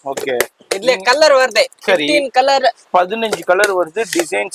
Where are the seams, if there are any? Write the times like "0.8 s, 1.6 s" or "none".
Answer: none